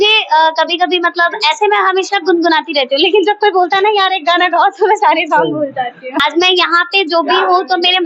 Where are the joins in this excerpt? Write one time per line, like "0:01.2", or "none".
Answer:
0:06.1

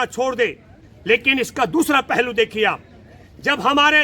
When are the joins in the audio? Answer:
none

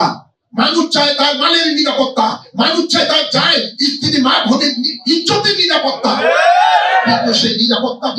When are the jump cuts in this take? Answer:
none

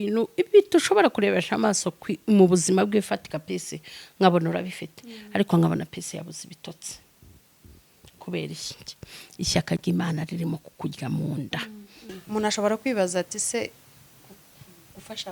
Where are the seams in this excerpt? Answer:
0:12.0

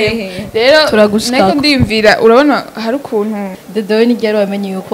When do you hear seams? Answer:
0:03.6

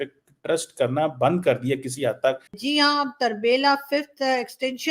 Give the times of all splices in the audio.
0:02.6

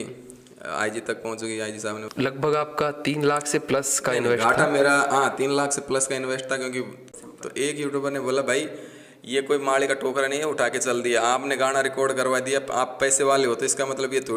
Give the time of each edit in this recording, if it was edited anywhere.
0:02.0
0:07.1

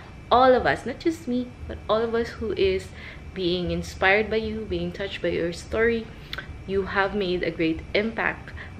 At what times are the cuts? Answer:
none

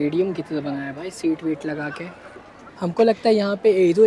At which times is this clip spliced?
0:02.7

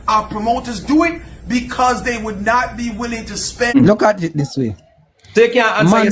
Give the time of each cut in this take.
0:03.8

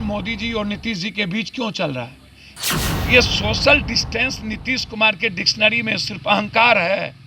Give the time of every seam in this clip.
0:02.5

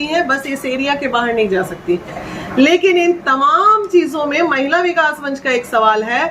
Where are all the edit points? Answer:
0:02.2

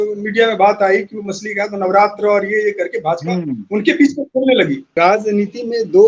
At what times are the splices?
0:05.0

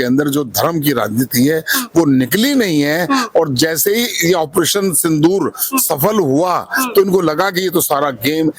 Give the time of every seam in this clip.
none

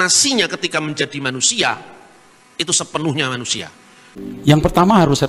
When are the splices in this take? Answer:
0:04.0

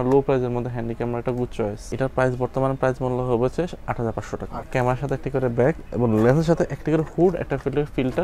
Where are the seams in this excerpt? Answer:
0:01.9
0:04.7

